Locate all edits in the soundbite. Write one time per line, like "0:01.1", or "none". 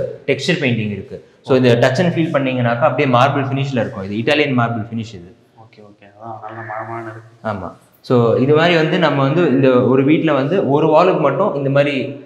none